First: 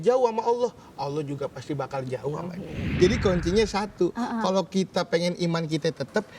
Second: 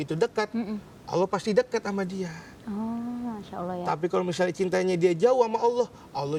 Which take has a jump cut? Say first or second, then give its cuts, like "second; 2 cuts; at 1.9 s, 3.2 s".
first; 1 cut; at 2.9 s